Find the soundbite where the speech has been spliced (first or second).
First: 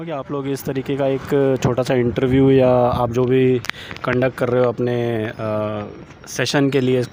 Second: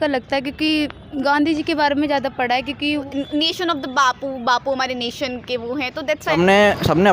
second